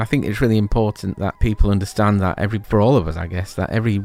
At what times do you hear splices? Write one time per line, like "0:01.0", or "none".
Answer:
0:01.4
0:02.6